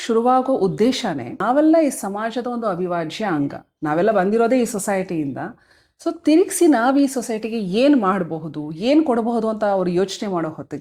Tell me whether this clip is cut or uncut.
cut